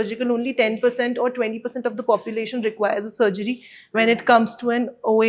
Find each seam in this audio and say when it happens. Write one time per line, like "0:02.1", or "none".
none